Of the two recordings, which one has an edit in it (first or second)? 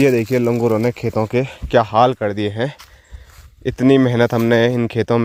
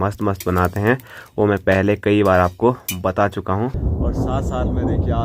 second